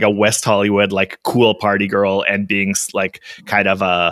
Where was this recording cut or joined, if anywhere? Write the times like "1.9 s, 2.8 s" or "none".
none